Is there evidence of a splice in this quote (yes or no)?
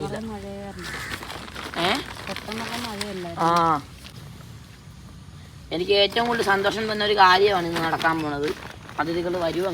yes